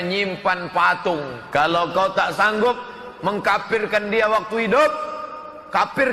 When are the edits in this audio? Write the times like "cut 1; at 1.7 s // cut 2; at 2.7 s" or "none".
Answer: cut 1; at 1.4 s